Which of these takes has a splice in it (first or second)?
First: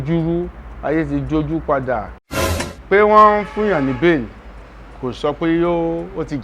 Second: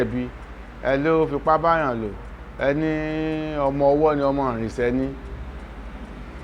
first